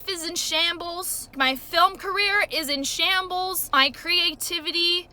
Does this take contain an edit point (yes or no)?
no